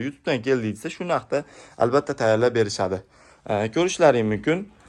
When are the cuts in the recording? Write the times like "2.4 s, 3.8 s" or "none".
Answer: none